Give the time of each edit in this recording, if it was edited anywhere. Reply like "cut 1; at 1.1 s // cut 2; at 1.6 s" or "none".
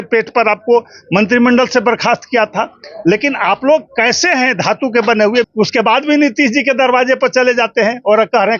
cut 1; at 5.5 s